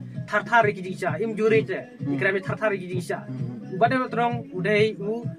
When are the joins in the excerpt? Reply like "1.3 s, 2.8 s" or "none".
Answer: none